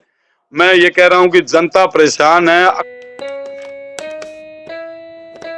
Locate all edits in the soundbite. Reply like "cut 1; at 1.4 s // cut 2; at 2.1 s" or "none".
cut 1; at 2.9 s